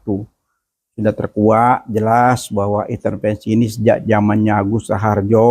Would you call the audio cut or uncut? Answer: uncut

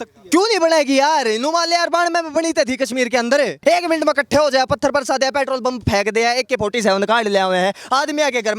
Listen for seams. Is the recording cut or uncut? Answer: cut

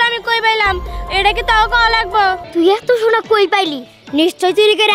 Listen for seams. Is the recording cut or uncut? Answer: cut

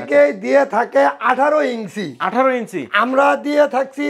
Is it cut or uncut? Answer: uncut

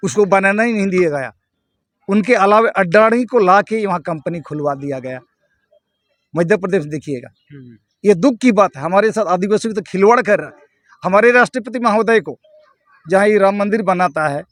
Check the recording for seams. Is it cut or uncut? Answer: uncut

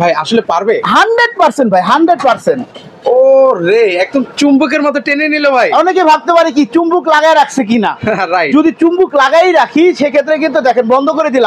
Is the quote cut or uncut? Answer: uncut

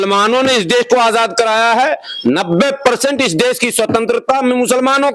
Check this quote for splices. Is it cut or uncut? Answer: uncut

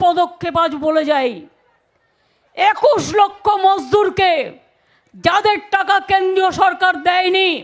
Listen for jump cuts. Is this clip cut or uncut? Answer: uncut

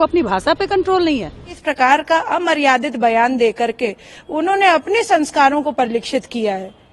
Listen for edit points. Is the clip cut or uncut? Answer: cut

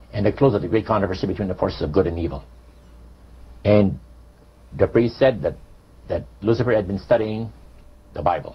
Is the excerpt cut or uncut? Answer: cut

